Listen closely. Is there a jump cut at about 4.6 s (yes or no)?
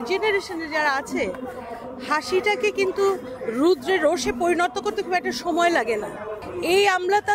no